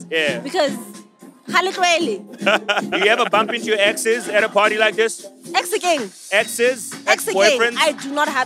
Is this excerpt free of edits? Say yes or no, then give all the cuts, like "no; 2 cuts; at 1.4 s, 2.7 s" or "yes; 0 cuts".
no; 3 cuts; at 2.9 s, 5.3 s, 6.2 s